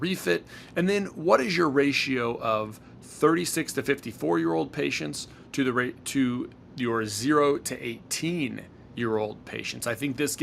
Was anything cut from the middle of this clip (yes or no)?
no